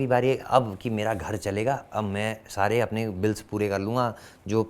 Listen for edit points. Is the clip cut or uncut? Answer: uncut